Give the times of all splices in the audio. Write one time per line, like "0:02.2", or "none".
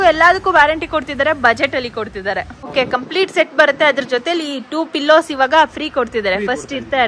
0:02.7